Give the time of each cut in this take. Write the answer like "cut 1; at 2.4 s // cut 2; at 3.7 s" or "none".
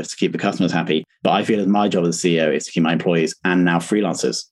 none